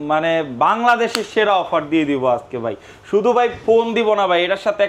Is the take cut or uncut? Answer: uncut